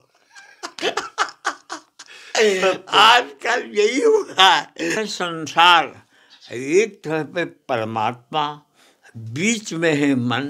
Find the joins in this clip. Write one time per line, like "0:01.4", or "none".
0:05.0